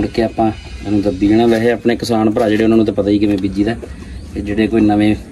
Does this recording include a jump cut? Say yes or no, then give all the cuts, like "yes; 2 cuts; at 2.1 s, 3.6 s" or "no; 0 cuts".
no; 0 cuts